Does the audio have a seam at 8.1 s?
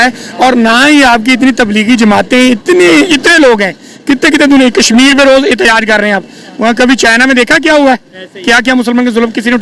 no; 0 cuts

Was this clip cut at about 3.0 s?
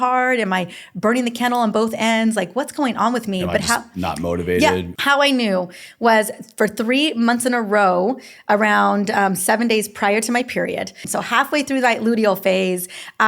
no; 2 cuts; at 4.9 s, 11.0 s

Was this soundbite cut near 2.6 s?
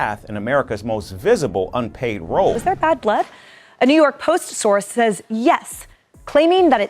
yes; 1 cut; at 2.6 s

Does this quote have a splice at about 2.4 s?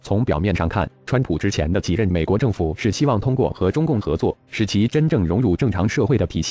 no; 1 cut; at 4.2 s

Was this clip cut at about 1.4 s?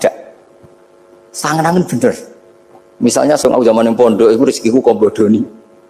no; 1 cut; at 3.4 s

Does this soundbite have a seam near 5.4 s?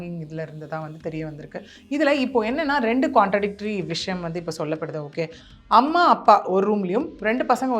yes; 1 cut; at 5.4 s

